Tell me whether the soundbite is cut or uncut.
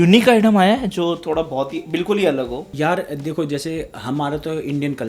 uncut